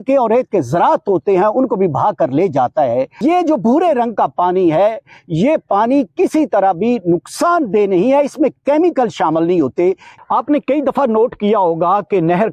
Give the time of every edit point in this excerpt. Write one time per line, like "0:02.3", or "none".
0:03.2
0:10.1